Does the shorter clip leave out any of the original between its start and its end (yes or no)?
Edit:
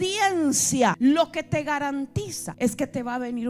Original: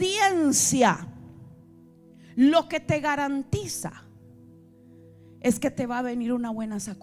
yes